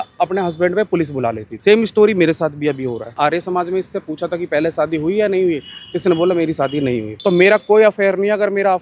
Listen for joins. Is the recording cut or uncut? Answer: cut